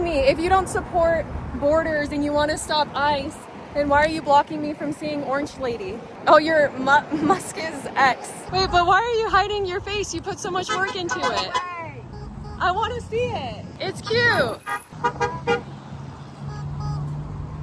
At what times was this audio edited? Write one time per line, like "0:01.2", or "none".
none